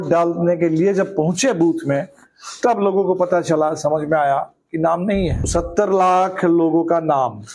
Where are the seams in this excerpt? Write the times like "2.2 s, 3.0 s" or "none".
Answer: 5.5 s